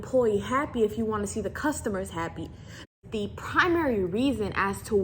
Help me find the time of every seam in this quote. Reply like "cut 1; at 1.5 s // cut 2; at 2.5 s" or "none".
cut 1; at 2.9 s